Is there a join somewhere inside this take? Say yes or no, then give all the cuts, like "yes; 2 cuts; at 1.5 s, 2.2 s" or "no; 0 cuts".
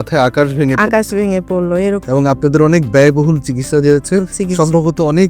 yes; 1 cut; at 2.0 s